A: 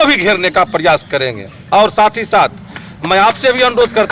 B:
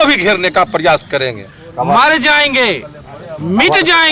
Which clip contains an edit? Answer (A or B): B